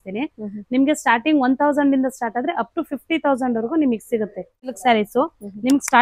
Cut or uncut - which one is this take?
cut